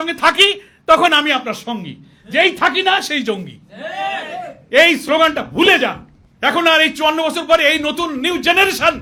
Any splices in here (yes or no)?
no